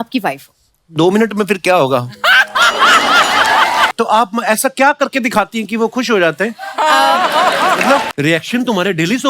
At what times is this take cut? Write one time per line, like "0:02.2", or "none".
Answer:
0:03.9
0:08.1